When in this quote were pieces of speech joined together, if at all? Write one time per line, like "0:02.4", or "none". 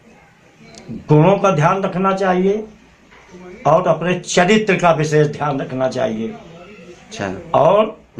none